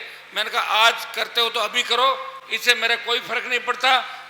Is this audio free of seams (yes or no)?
yes